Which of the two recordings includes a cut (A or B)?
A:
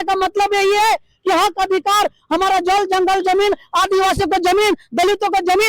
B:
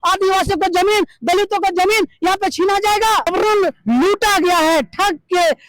B